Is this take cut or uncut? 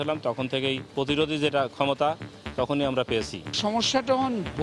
cut